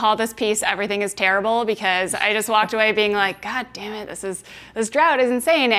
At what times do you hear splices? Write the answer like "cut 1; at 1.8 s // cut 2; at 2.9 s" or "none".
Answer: none